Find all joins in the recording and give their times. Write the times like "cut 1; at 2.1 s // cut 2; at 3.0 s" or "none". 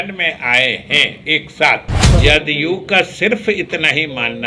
cut 1; at 2.1 s